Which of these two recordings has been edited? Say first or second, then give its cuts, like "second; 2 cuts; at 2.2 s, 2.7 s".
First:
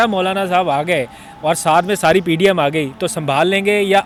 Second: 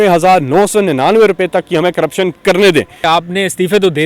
second; 1 cut; at 3.0 s